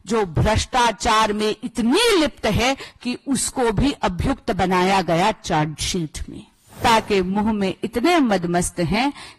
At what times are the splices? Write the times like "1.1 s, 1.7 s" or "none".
6.7 s